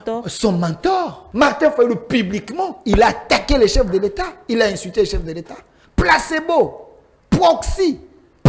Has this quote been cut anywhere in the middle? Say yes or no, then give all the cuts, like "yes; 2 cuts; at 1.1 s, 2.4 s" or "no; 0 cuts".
yes; 1 cut; at 1.2 s